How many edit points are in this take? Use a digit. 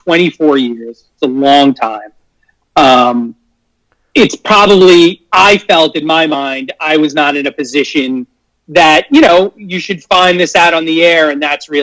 0